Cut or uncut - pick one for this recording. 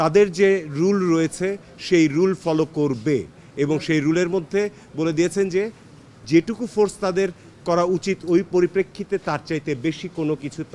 uncut